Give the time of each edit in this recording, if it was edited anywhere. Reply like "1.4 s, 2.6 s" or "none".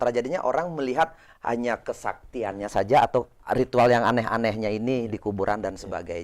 3.3 s